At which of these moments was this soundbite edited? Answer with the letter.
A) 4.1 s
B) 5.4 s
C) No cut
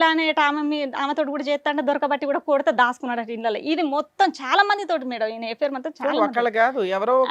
C